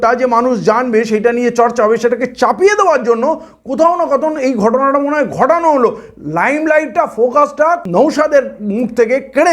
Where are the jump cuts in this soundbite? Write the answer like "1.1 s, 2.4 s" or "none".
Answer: 7.8 s